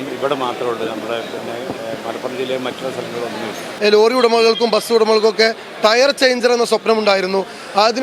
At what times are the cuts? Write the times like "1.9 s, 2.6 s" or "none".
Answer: 3.7 s